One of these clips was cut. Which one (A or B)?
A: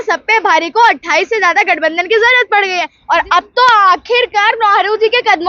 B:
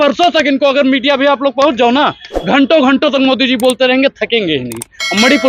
A